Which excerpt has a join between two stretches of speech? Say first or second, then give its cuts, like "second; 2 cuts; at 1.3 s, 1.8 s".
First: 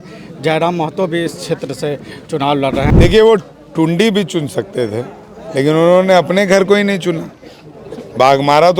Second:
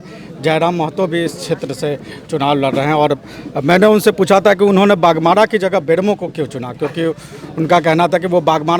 first; 1 cut; at 2.9 s